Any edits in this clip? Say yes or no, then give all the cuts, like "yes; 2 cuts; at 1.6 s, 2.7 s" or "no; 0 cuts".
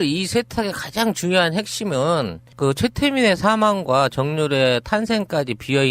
no; 0 cuts